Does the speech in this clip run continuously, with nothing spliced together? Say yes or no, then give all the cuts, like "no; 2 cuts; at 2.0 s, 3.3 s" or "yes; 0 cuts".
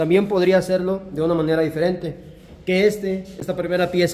yes; 0 cuts